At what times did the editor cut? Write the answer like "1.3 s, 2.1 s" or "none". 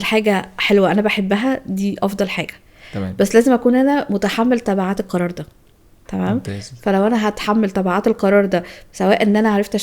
none